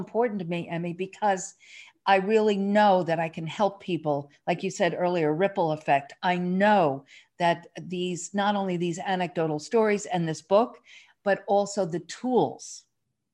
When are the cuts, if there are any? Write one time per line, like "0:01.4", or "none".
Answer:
none